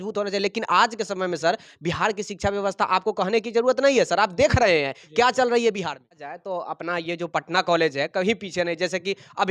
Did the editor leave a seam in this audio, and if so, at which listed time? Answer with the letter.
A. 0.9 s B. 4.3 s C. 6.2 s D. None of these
C